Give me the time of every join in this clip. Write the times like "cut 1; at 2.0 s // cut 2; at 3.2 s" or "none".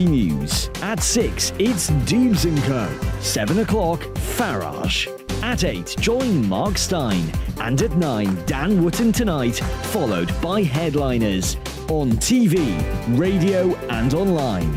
none

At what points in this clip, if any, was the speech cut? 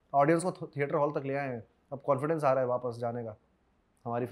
none

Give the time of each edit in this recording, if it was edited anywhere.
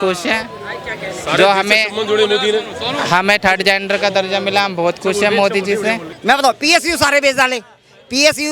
cut 1; at 6.1 s

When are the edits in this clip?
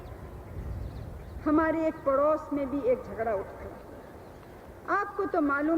none

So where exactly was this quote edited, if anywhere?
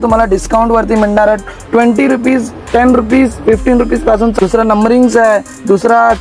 cut 1; at 4.3 s

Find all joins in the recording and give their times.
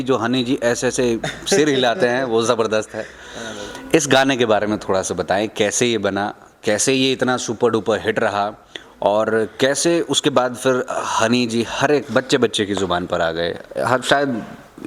none

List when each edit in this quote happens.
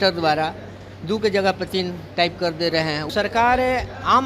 cut 1; at 3.0 s

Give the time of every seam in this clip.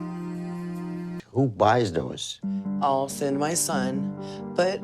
cut 1; at 1.2 s

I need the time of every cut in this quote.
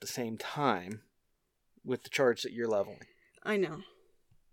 none

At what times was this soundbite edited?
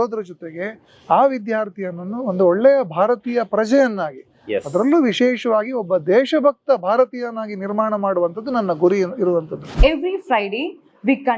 cut 1; at 9.6 s

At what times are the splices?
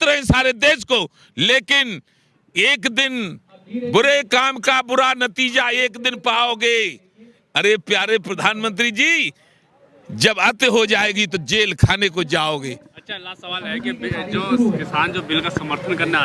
none

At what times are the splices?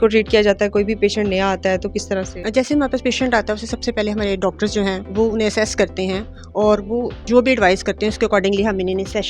cut 1; at 2.4 s // cut 2; at 5.0 s // cut 3; at 7.2 s

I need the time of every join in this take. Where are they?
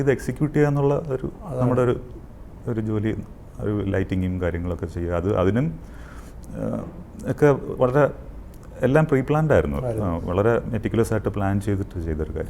none

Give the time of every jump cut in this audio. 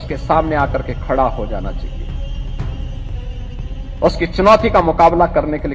cut 1; at 2.0 s // cut 2; at 3.5 s

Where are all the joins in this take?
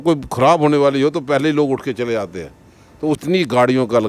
cut 1; at 3.2 s

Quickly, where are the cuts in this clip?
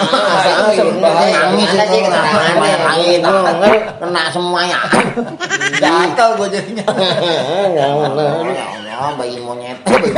none

